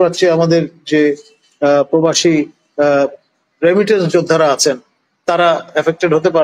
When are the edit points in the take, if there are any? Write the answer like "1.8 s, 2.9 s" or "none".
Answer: none